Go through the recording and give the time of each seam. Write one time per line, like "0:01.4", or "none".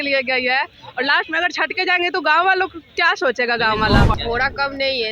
0:04.1